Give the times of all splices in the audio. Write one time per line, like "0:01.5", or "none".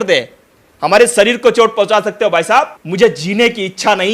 0:02.8